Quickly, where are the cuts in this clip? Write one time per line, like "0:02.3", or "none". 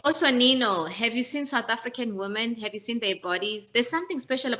none